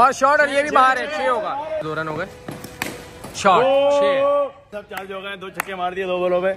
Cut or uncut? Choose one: cut